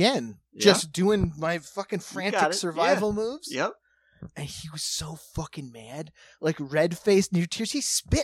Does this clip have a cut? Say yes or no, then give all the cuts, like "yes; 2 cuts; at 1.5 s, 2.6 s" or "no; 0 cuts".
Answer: no; 0 cuts